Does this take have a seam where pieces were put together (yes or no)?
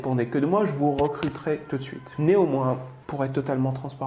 yes